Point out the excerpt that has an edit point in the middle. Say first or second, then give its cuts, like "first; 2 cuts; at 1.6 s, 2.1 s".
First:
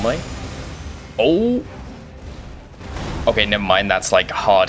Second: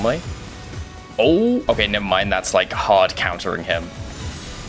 second; 2 cuts; at 1.6 s, 3.9 s